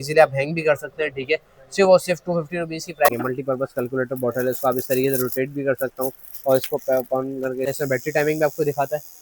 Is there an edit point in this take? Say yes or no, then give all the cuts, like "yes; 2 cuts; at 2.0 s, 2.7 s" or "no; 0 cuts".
yes; 2 cuts; at 3.1 s, 7.7 s